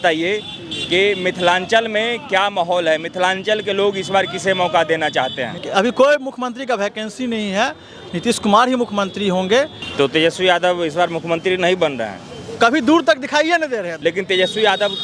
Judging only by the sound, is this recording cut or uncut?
cut